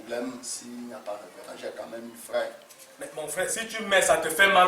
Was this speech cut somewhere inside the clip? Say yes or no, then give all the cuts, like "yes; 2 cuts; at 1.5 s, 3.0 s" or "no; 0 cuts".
no; 0 cuts